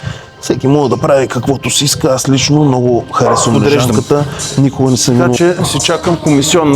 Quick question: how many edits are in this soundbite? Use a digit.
1